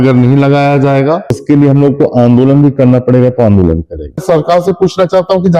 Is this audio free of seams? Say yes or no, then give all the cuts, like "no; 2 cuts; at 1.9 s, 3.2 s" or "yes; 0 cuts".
no; 2 cuts; at 1.4 s, 4.2 s